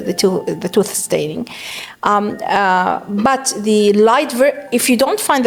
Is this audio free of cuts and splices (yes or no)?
yes